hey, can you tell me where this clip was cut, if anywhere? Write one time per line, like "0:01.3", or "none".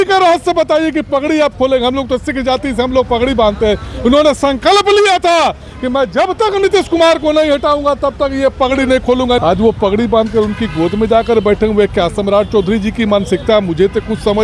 0:09.4

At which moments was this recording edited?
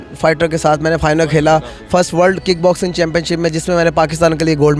none

